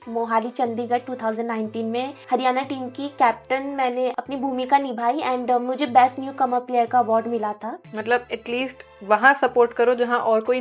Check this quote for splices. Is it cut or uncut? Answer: cut